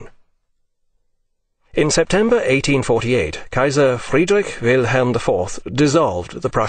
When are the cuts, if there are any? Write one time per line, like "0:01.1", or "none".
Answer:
none

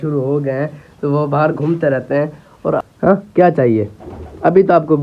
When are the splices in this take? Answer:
0:02.8

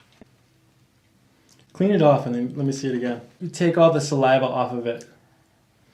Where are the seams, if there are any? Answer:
0:03.4

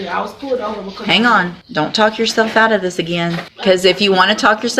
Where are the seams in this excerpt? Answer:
0:01.6
0:03.5

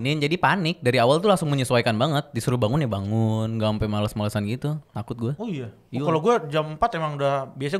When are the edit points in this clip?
none

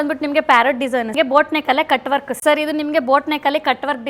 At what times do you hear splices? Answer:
0:01.1
0:02.3

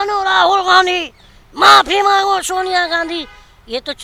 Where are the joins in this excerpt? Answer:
none

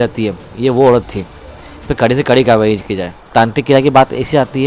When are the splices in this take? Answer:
0:03.2

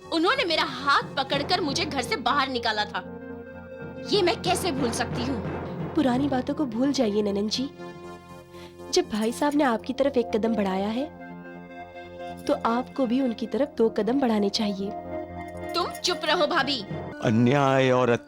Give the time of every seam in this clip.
0:17.1

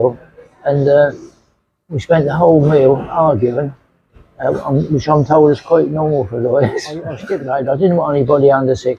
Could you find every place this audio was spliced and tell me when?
0:07.3

